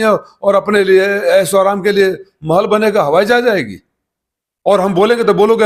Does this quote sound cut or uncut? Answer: uncut